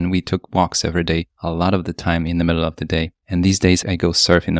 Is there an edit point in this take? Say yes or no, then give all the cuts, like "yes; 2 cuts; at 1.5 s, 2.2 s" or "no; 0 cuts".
yes; 3 cuts; at 1.3 s, 3.2 s, 3.8 s